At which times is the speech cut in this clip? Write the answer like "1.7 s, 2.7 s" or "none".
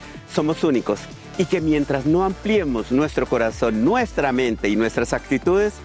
1.2 s